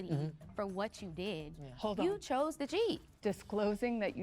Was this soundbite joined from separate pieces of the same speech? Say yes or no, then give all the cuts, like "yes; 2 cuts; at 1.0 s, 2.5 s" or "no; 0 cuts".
yes; 2 cuts; at 1.6 s, 3.1 s